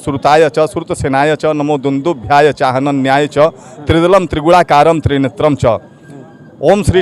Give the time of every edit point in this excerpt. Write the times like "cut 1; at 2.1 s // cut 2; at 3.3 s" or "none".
none